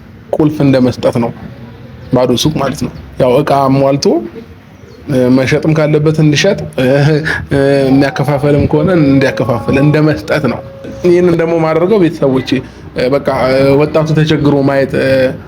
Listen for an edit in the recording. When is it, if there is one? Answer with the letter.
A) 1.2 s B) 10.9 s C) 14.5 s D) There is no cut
B